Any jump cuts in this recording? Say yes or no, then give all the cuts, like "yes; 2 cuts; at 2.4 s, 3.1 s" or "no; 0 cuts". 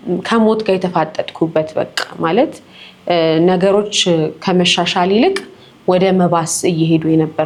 no; 0 cuts